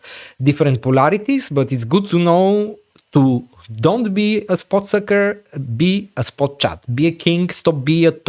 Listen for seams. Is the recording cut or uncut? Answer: uncut